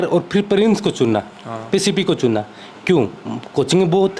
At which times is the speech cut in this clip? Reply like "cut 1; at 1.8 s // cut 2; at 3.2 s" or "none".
none